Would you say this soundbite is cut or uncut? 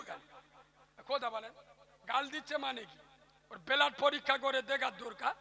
uncut